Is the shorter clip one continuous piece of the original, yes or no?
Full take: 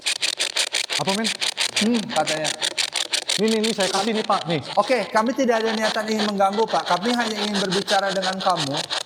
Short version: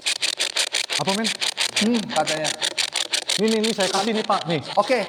yes